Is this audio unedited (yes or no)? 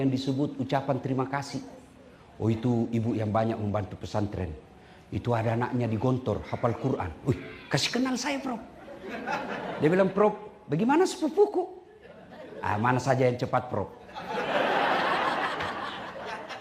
yes